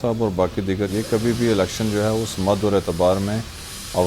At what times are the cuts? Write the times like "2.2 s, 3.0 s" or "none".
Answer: 0.9 s